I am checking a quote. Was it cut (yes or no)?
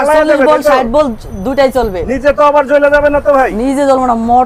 no